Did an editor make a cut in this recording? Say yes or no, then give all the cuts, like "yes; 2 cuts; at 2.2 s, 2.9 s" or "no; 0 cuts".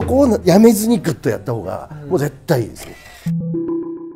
yes; 1 cut; at 3.1 s